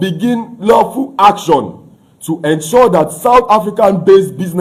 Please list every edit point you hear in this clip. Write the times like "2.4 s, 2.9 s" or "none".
none